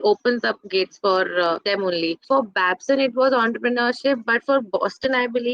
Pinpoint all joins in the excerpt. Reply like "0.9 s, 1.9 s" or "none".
2.1 s

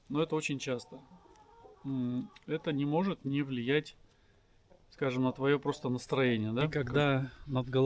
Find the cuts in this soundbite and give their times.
6.7 s

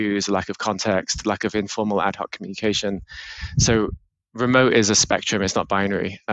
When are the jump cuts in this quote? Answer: none

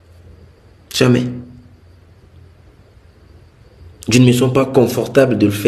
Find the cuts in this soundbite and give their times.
none

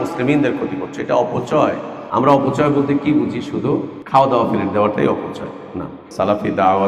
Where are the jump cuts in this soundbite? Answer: 1.9 s, 4.0 s, 6.0 s

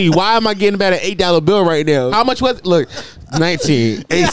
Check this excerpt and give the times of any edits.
2.1 s

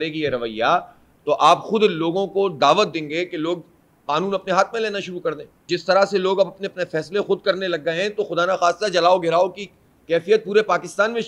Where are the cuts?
5.7 s

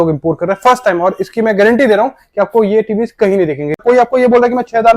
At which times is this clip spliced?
3.8 s

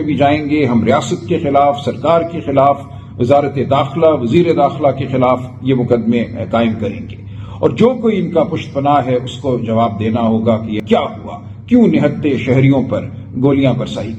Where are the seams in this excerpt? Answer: 10.8 s

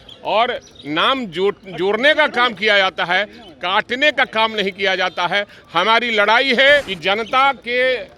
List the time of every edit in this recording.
6.9 s

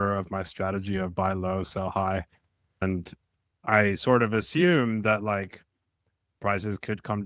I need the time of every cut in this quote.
2.8 s

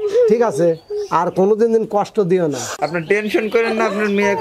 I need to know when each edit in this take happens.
2.7 s

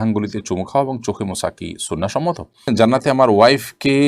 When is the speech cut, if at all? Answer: 2.7 s

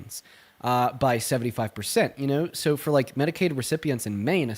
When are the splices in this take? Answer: none

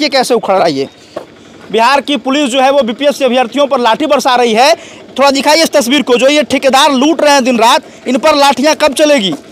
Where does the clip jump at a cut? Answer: 1.2 s

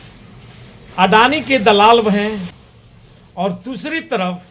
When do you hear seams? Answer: 2.5 s

